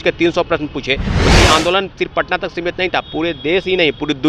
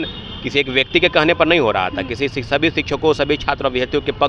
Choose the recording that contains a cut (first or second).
first